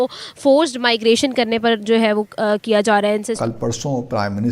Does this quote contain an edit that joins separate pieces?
yes; 1 cut; at 3.4 s

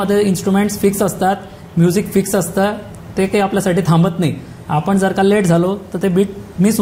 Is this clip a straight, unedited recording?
yes; 0 cuts

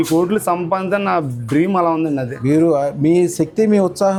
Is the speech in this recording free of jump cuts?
yes; 0 cuts

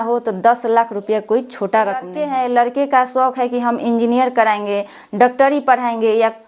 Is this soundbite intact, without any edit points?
no; 1 cut; at 2.2 s

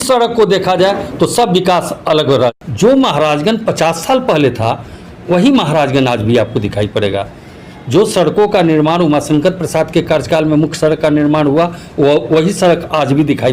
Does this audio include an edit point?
yes; 1 cut; at 2.5 s

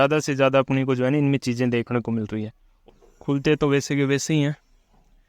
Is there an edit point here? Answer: yes; 1 cut; at 2.6 s

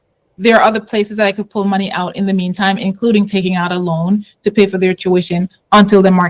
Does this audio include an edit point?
no; 0 cuts

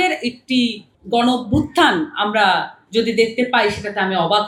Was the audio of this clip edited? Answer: no; 0 cuts

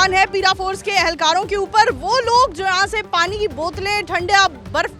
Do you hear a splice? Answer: no; 0 cuts

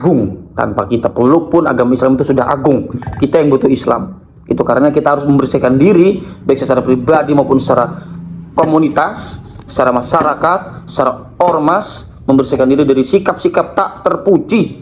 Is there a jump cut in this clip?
no; 0 cuts

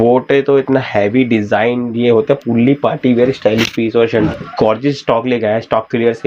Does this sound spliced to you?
yes; 1 cut; at 4.3 s

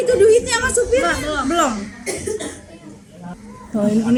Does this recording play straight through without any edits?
yes; 0 cuts

